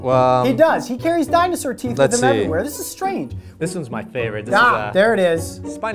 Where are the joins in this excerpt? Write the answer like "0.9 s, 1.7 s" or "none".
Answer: 3.4 s